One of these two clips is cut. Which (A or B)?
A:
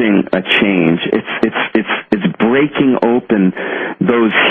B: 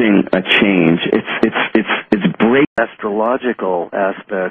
A